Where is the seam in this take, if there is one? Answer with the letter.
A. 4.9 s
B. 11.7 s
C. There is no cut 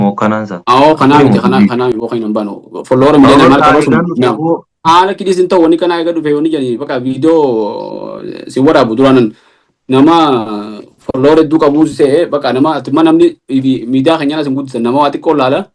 A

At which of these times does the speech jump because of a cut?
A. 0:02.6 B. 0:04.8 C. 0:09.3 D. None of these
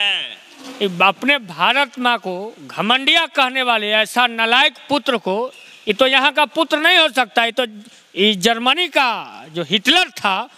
D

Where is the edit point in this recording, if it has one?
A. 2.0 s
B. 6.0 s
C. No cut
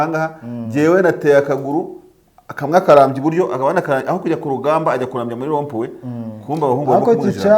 C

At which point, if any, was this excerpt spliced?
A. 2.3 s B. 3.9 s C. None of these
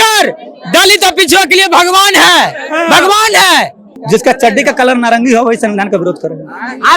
B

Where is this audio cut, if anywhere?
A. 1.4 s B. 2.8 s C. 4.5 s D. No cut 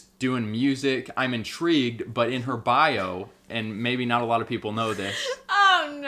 D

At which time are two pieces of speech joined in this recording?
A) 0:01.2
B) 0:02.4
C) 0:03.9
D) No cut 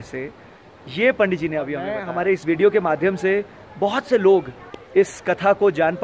B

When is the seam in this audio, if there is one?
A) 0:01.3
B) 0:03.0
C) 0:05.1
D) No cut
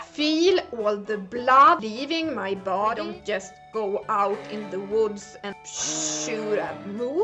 B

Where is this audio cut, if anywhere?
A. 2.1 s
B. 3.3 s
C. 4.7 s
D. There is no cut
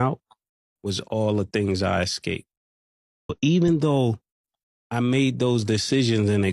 B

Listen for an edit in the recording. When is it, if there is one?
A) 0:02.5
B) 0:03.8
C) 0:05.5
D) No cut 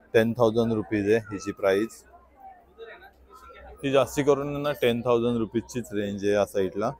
D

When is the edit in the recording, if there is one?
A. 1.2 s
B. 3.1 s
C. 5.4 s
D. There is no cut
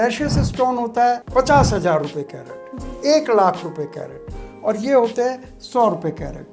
A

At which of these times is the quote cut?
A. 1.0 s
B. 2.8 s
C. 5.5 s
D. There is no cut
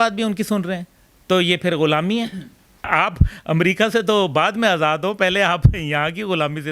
B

